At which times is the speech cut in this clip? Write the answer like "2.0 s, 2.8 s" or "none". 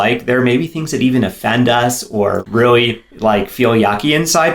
2.4 s